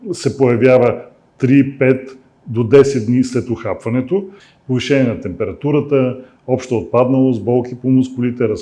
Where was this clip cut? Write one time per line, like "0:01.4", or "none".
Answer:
0:04.4